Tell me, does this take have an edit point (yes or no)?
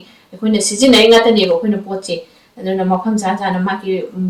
no